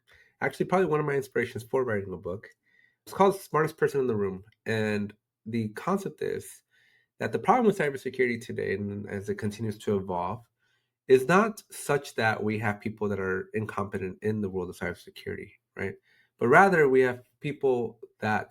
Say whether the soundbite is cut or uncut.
cut